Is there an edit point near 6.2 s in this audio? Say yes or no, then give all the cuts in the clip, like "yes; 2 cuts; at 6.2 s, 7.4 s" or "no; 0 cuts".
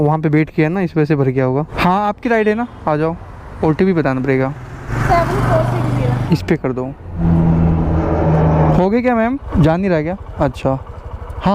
yes; 2 cuts; at 1.7 s, 6.2 s